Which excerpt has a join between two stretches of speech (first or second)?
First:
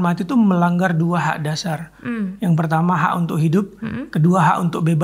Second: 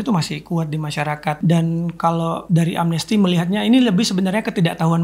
second